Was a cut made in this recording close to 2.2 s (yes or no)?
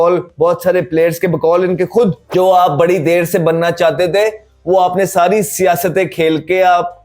yes